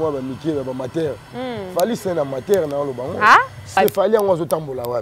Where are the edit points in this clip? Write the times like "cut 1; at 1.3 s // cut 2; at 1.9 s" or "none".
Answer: cut 1; at 3.8 s